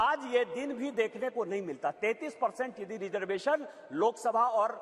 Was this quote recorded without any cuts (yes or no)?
yes